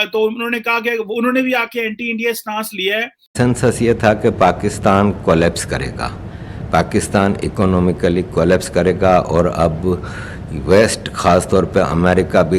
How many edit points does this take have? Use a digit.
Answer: 1